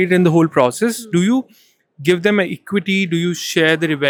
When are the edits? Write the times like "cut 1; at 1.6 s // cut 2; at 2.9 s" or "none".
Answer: none